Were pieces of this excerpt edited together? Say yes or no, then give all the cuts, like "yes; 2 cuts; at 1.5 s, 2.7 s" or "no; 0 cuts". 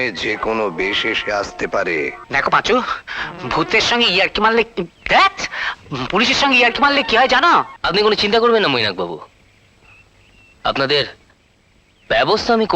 yes; 2 cuts; at 2.2 s, 7.8 s